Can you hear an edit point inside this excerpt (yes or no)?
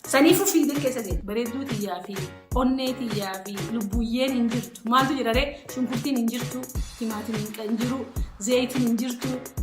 yes